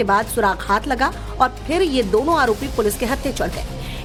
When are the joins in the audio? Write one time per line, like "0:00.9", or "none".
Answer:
none